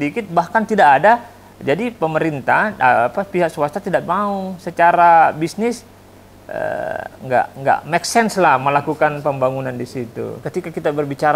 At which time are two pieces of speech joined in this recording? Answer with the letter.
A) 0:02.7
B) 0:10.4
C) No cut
B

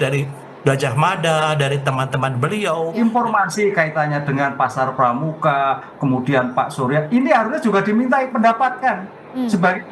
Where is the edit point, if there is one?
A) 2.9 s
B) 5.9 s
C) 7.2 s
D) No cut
A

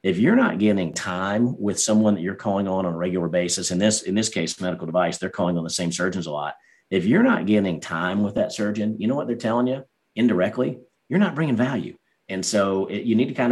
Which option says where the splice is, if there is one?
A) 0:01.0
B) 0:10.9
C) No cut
A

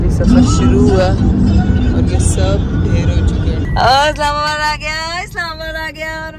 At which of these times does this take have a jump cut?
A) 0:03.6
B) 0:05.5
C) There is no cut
A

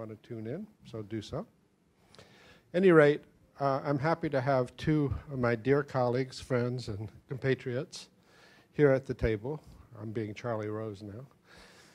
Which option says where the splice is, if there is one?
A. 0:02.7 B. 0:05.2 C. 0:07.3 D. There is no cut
A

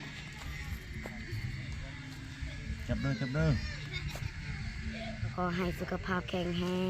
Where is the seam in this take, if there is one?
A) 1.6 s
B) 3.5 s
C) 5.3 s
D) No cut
C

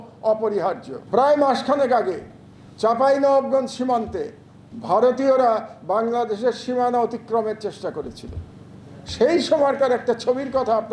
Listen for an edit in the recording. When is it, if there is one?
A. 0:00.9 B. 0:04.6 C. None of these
A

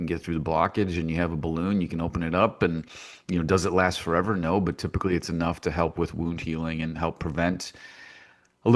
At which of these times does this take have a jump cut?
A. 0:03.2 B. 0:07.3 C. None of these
C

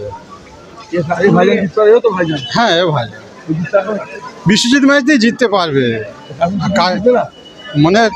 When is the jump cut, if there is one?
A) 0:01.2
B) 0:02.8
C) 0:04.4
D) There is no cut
D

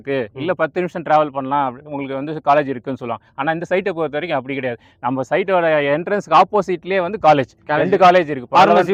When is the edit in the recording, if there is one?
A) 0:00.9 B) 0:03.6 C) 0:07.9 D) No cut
D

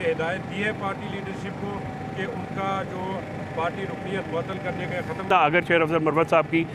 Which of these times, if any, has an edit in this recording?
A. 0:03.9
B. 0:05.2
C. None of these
B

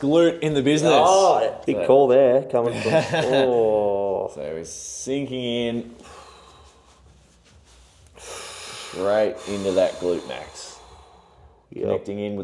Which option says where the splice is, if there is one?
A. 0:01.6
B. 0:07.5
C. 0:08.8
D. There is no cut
A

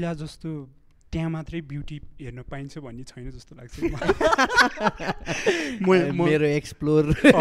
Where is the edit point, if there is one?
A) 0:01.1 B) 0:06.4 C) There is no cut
C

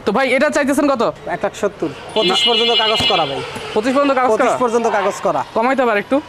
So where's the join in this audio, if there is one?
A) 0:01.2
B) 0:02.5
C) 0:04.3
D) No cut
A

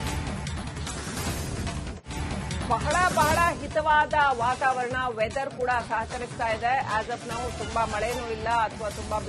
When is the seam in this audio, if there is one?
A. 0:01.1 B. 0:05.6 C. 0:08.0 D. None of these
A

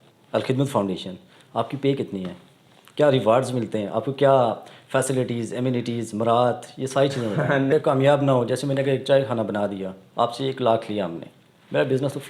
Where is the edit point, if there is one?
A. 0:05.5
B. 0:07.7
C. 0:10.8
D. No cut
B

